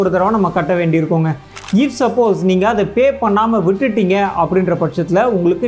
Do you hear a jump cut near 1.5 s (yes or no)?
yes